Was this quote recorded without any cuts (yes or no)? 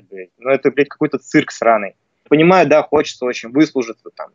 no